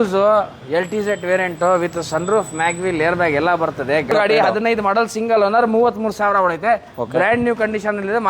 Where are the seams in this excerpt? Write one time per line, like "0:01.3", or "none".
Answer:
0:04.1